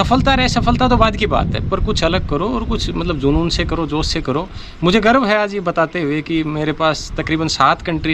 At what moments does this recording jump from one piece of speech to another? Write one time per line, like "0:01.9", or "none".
none